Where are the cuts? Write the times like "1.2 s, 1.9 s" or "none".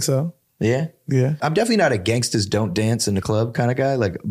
1.4 s